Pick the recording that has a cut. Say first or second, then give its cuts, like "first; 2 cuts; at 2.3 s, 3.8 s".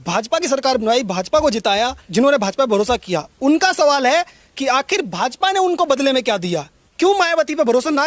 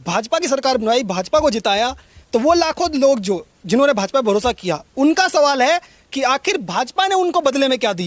first; 2 cuts; at 2.0 s, 6.8 s